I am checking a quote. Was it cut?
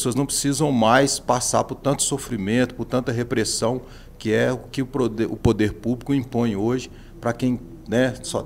no; 0 cuts

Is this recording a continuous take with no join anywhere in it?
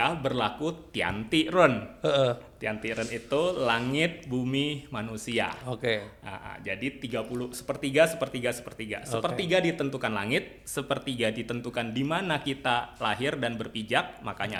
yes; 0 cuts

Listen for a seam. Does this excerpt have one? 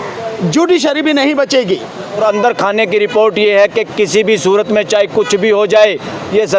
yes; 1 cut; at 2.2 s

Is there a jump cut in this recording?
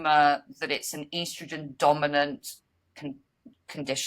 no; 0 cuts

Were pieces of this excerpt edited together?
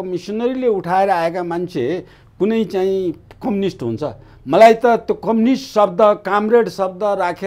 no; 0 cuts

